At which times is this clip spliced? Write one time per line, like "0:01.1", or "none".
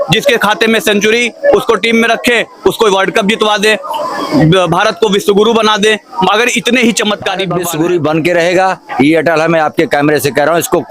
0:07.6

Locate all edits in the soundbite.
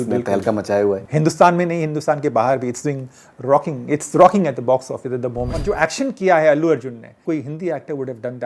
0:01.0
0:05.6
0:07.1

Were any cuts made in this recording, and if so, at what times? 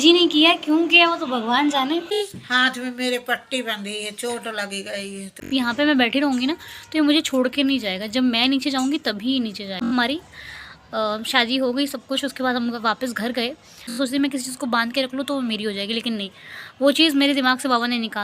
0:02.4
0:05.4
0:09.9
0:14.0

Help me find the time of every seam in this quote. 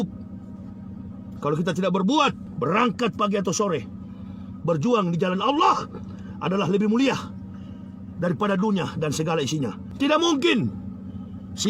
0:02.5
0:09.8

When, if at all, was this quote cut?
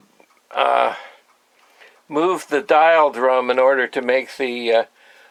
none

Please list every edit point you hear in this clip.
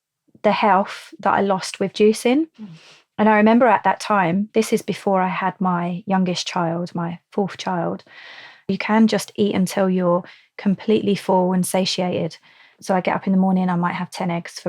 0:08.6
0:12.7

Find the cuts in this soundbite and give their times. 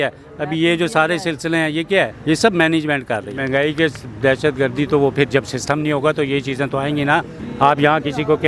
0:02.2
0:03.3
0:07.4

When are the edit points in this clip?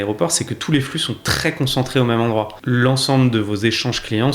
0:02.6

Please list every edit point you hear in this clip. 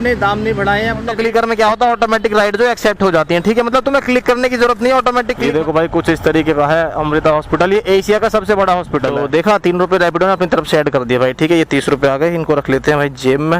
0:01.1
0:05.4
0:09.2

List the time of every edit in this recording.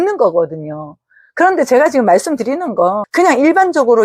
0:03.0

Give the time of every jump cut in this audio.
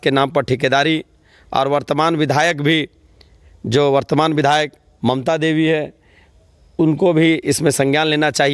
none

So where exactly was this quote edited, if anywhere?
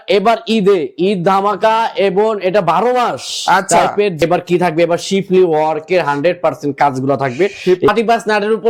0:04.2
0:07.9

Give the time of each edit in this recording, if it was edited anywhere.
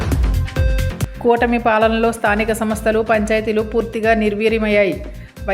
none

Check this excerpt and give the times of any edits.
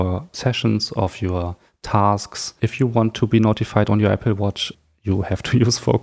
none

